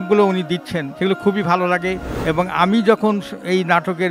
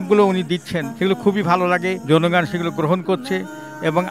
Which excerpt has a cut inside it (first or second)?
first